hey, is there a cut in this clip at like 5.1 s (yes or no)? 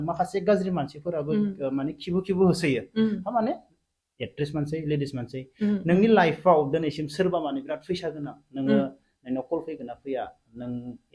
no